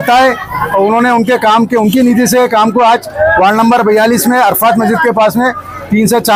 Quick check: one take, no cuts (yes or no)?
yes